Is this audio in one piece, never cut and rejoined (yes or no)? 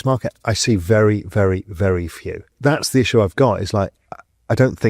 no